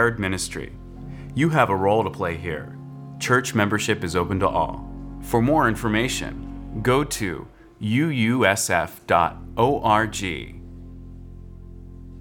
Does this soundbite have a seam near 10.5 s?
yes; 1 cut; at 10.5 s

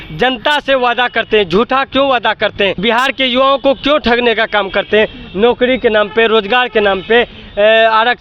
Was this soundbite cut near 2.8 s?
yes; 1 cut; at 2.8 s

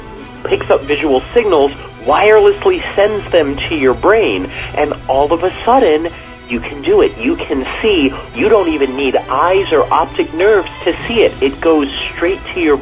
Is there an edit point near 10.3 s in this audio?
no; 1 cut; at 8.3 s

